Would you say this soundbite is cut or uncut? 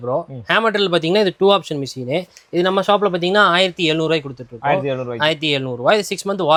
uncut